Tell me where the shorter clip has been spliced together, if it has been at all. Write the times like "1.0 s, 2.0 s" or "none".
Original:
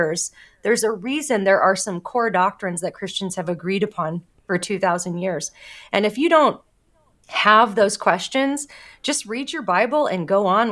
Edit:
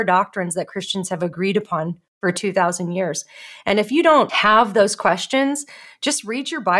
4.3 s